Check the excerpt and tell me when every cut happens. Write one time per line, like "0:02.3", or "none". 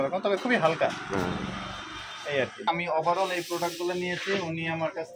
0:02.6